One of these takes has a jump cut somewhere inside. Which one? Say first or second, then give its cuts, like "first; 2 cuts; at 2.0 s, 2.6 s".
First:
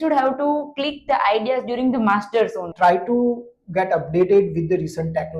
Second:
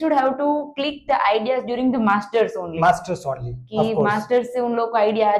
first; 1 cut; at 2.7 s